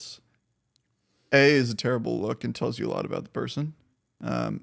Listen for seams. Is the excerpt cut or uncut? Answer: uncut